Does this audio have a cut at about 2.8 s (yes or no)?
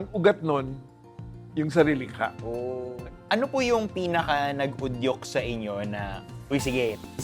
yes